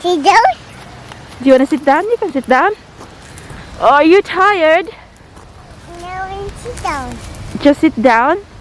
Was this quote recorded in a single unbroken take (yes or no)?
yes